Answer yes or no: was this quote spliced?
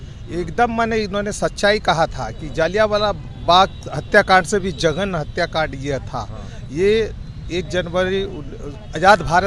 no